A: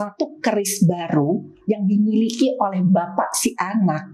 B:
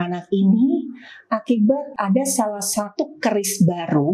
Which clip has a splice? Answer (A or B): B